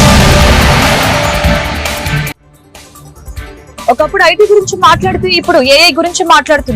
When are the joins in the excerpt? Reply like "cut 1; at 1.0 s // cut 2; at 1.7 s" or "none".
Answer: cut 1; at 3.9 s